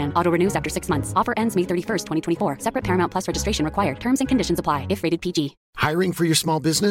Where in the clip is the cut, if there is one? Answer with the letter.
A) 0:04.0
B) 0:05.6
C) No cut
B